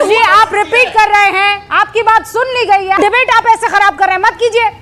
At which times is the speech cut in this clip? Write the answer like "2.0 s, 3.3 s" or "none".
3.0 s